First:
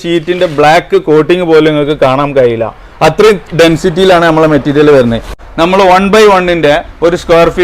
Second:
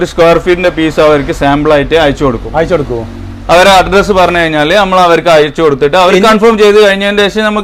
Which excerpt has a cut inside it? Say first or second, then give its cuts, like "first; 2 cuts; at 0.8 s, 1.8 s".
first; 1 cut; at 5.3 s